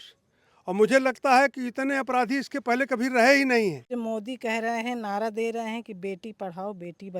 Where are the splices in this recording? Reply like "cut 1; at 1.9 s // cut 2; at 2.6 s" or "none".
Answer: cut 1; at 3.9 s